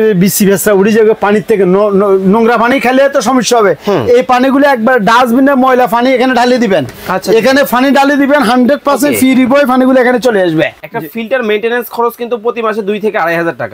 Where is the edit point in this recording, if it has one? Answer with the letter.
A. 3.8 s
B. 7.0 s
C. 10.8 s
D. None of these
C